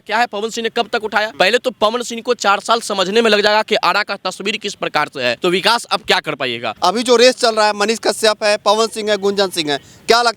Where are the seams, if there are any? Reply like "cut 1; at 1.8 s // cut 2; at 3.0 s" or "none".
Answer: cut 1; at 1.3 s // cut 2; at 5.4 s // cut 3; at 6.6 s